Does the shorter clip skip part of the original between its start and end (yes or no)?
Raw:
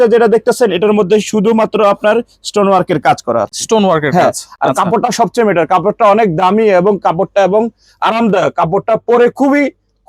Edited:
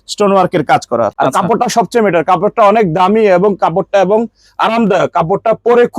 yes